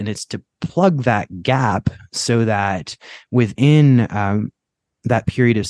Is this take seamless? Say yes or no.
yes